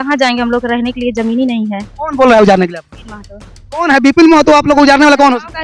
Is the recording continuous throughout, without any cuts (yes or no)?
yes